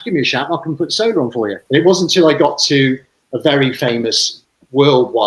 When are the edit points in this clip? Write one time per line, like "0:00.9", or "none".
0:01.6